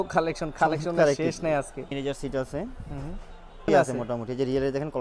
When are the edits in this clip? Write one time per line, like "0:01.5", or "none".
0:01.9
0:03.6